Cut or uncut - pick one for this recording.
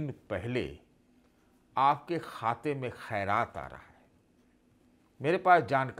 uncut